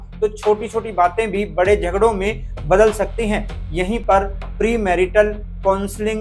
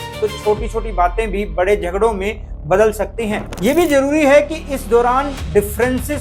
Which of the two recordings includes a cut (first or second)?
second